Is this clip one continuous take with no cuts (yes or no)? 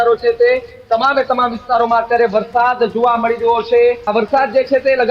no